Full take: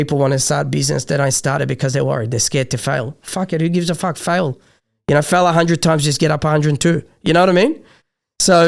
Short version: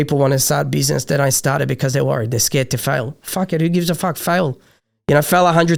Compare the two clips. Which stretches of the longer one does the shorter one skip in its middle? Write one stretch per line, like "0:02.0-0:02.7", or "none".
none